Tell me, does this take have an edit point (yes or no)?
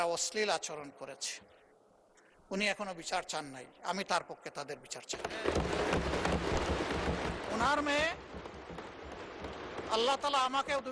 yes